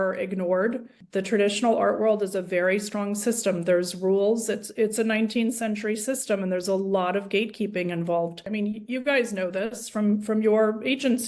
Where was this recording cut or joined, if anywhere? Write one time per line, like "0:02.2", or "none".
0:01.0
0:08.4